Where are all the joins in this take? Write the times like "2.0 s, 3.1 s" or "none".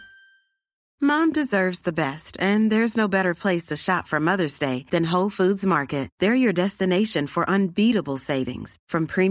none